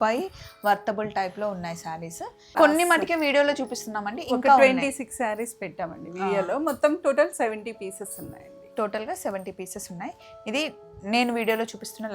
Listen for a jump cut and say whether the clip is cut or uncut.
cut